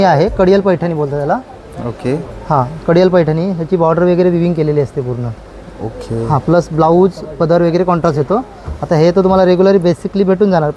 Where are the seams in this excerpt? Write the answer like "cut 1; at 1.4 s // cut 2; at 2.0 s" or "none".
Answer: none

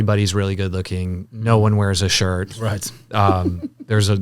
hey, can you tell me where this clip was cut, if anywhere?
none

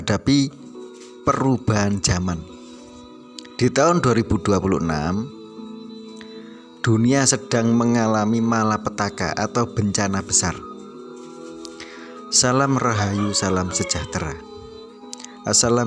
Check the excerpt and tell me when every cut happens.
cut 1; at 5.3 s // cut 2; at 6.8 s

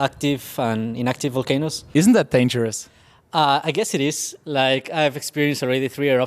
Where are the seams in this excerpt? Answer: cut 1; at 1.8 s

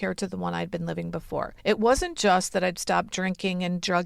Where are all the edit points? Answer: cut 1; at 1.5 s

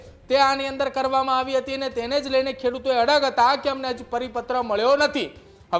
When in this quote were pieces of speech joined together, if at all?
none

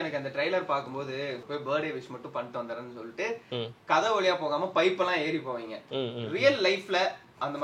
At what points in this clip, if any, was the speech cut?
cut 1; at 1.4 s

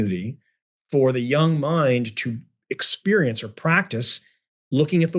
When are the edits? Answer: none

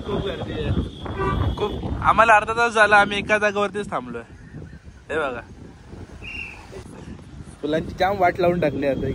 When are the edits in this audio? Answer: cut 1; at 6.8 s

